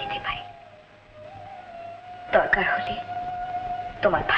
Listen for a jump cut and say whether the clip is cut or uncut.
uncut